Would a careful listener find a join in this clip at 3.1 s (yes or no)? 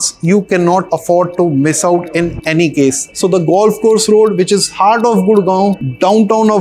yes